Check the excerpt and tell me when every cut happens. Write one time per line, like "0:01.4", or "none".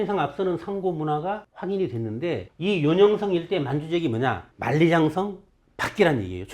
0:01.5
0:02.5
0:04.5